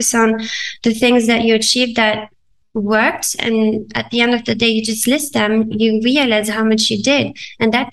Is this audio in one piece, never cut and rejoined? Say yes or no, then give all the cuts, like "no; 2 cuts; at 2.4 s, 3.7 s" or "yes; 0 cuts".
yes; 0 cuts